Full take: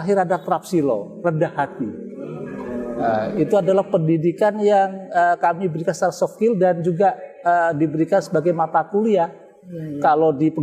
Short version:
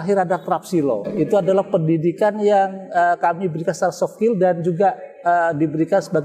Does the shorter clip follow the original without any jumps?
no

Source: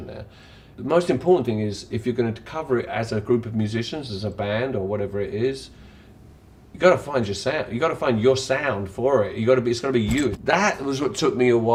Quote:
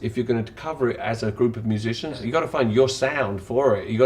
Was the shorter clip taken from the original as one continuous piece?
no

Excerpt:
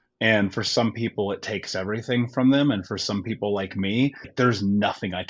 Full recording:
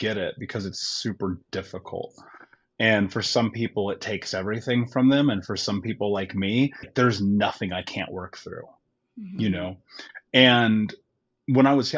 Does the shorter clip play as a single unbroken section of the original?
yes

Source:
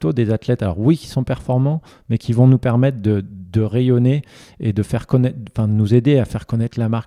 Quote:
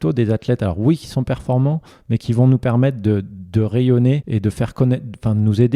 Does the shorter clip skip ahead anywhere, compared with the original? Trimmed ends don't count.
yes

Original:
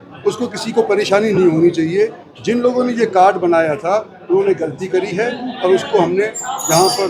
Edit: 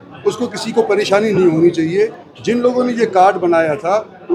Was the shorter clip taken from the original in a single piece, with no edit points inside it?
yes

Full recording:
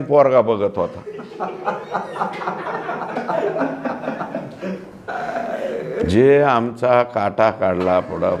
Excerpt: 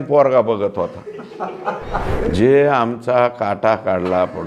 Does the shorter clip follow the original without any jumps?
no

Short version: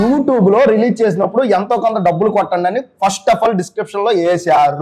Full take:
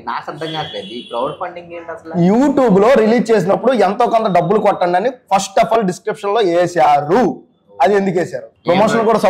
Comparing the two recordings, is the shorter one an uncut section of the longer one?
yes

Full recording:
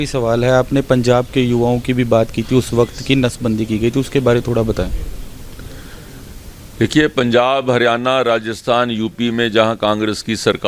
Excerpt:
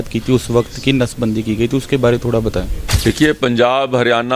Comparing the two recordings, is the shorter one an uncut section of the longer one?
no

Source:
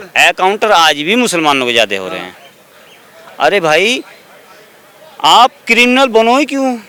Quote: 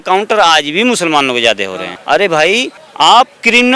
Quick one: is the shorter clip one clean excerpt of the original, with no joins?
no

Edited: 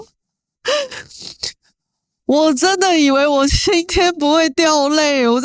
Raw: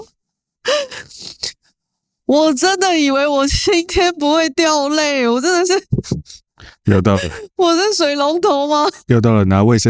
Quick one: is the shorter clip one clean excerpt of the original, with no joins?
yes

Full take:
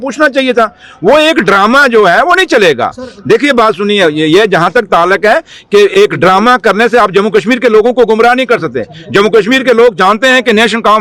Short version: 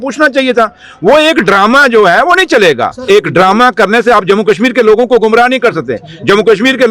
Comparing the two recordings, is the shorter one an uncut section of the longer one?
no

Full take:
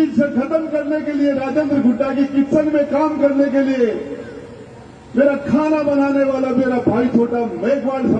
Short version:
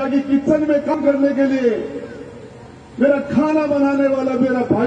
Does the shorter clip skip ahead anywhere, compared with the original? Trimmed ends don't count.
yes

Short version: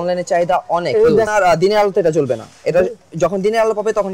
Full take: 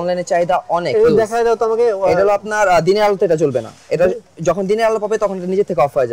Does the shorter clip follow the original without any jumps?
no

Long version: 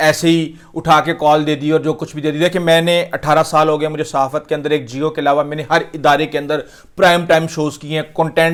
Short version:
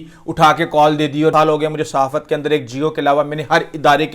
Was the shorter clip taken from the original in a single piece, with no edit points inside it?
no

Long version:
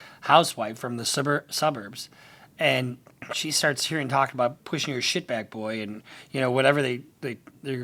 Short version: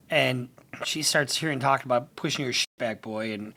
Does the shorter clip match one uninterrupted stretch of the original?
yes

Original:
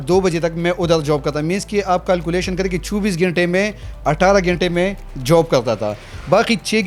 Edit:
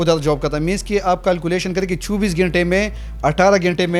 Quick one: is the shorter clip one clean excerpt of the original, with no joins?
yes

